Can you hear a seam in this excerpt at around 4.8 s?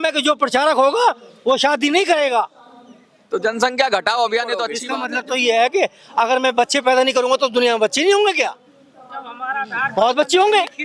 yes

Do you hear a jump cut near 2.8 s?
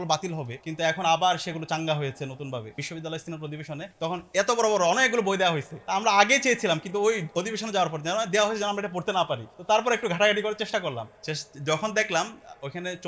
yes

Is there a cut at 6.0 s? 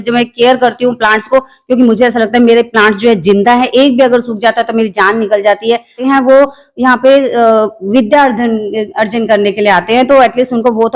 yes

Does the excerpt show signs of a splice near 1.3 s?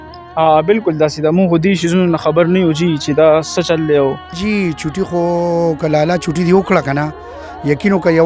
no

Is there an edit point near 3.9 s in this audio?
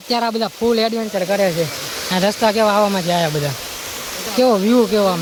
no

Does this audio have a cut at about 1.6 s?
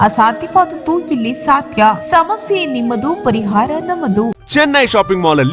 no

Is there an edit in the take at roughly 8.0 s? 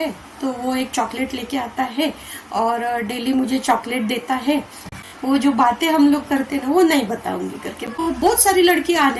yes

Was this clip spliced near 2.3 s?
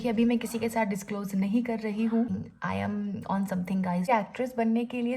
yes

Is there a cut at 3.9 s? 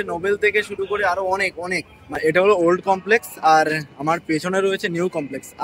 no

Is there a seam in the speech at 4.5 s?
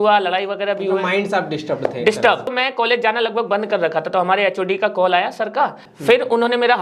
no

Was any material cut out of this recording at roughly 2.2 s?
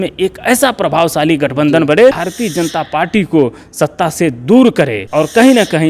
yes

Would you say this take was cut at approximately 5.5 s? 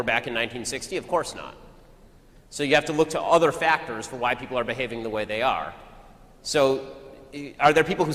no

